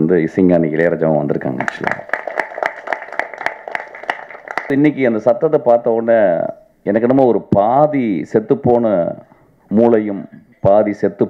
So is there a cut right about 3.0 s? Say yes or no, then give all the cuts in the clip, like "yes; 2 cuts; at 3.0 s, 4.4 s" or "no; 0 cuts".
no; 1 cut; at 4.7 s